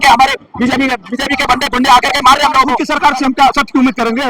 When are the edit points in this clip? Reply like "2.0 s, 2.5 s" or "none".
2.7 s